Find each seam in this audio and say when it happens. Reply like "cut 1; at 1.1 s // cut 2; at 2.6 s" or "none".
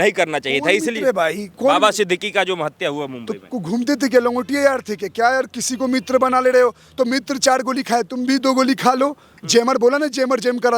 cut 1; at 9.3 s